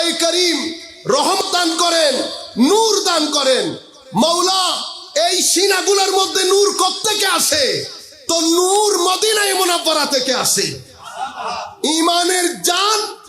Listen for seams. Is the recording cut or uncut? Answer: cut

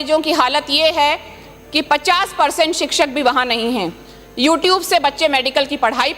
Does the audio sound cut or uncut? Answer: uncut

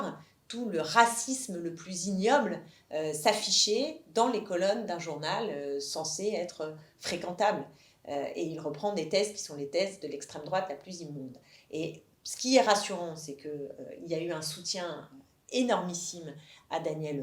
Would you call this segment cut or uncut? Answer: uncut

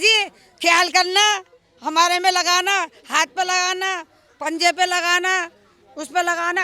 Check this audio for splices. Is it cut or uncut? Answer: uncut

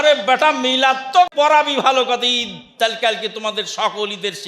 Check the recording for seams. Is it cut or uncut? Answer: cut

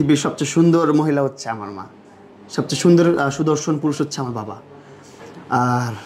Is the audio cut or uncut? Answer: uncut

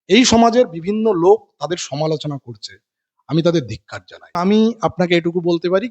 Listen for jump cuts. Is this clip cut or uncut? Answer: cut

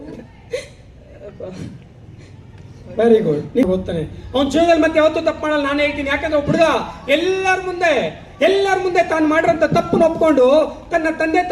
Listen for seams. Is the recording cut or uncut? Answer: cut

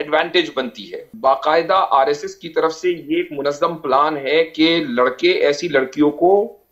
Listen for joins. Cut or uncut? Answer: cut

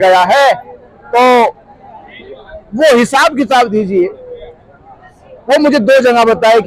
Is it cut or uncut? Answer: uncut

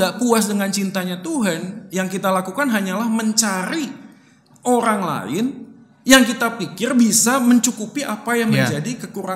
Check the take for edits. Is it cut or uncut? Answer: uncut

